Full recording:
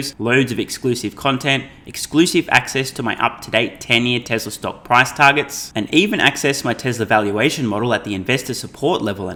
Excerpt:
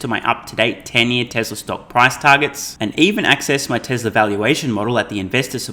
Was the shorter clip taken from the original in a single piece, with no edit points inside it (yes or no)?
yes